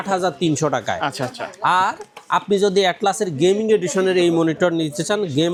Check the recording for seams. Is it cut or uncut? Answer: uncut